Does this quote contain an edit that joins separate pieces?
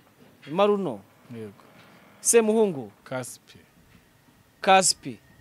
no; 0 cuts

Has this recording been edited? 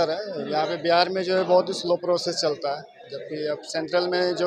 no; 0 cuts

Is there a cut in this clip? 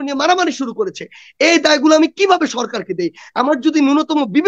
no; 0 cuts

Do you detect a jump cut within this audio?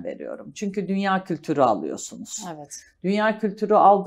no; 0 cuts

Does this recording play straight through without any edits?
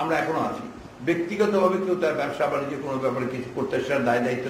yes; 0 cuts

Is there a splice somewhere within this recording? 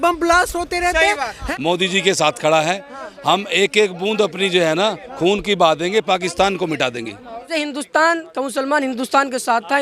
yes; 2 cuts; at 1.3 s, 7.5 s

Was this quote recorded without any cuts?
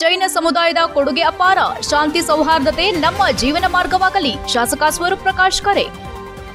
yes; 0 cuts

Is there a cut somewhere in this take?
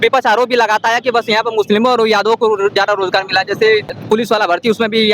yes; 1 cut; at 3.9 s

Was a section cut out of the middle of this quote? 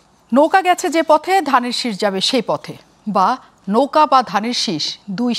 no; 0 cuts

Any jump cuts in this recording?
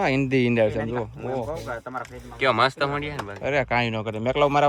no; 0 cuts

